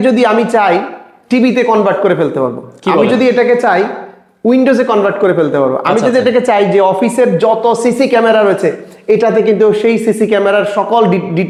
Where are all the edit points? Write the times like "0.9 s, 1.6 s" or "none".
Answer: none